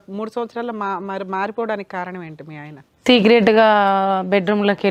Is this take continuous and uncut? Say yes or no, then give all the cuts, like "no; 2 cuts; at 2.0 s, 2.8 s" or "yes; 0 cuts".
yes; 0 cuts